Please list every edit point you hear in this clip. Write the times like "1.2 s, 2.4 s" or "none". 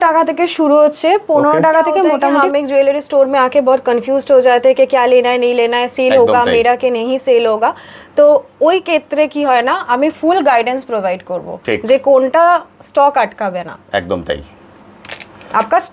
2.4 s